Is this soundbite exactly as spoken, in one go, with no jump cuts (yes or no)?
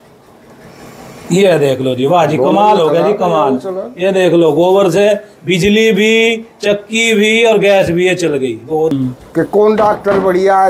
no